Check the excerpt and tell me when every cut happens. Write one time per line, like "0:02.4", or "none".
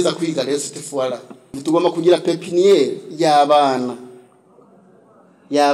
0:01.6